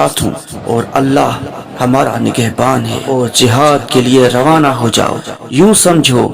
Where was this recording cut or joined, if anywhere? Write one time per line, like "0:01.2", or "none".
0:03.0

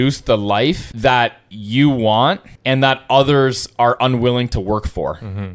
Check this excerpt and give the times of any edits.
0:00.9
0:02.5

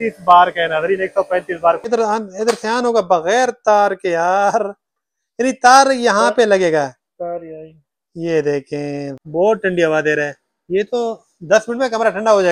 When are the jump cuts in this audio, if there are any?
0:01.8
0:09.0

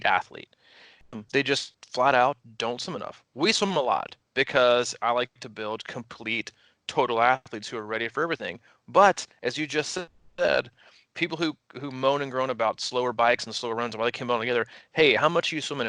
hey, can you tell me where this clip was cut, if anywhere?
0:00.9
0:01.8

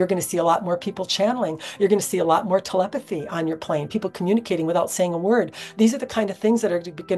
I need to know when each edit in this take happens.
none

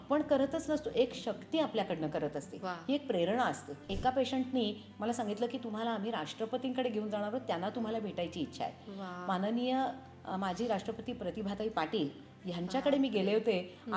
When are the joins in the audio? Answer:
0:03.9

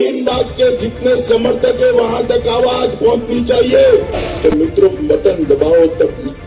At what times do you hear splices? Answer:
none

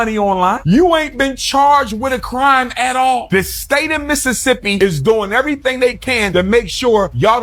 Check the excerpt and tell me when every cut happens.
none

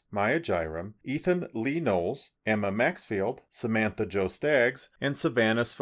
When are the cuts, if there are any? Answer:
none

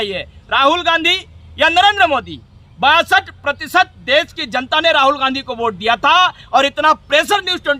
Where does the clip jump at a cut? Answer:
none

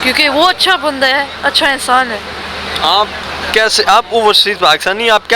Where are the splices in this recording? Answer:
none

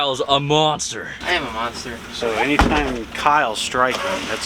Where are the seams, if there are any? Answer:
0:01.1

